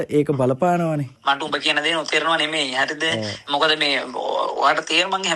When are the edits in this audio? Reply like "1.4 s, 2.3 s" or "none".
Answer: 1.1 s